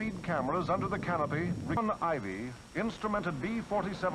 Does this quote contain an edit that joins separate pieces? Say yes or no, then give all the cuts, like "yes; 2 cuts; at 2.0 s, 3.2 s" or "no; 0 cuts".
yes; 1 cut; at 1.8 s